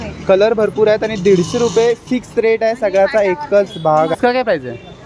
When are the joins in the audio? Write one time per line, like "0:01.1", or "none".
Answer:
0:04.1

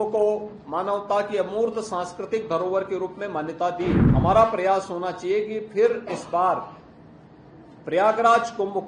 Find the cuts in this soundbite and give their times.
0:04.0

